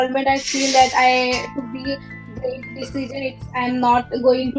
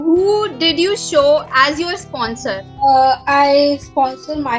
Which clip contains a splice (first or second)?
second